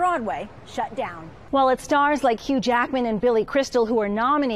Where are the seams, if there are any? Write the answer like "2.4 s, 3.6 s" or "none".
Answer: 1.4 s